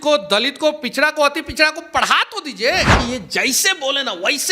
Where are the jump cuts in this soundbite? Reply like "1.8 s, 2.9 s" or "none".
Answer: 3.0 s

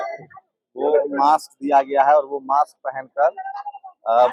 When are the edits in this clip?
none

